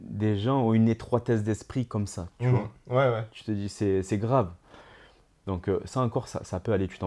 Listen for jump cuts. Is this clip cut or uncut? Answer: uncut